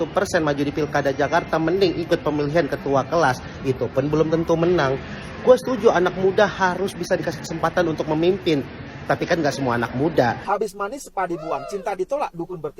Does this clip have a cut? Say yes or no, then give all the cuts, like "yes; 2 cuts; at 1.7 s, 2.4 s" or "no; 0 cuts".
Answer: yes; 1 cut; at 10.4 s